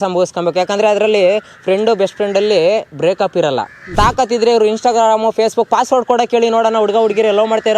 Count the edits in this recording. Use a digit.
1